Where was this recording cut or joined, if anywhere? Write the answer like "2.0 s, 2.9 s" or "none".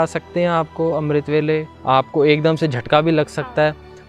1.7 s